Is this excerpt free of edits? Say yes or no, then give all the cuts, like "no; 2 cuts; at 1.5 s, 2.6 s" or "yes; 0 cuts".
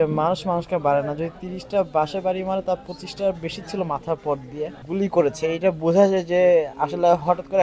no; 1 cut; at 4.8 s